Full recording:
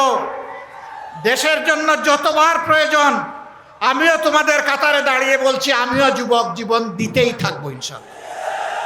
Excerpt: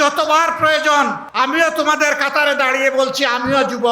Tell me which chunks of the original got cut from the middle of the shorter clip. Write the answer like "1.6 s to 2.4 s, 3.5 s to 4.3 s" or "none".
3.3 s to 3.7 s